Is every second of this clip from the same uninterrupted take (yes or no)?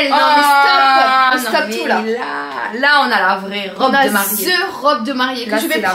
yes